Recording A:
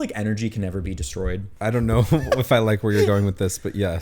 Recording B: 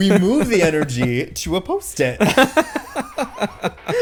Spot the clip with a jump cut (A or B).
A